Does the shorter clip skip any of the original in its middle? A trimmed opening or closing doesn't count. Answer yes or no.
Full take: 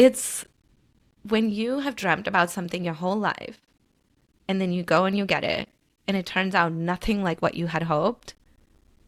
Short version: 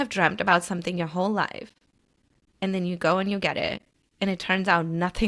no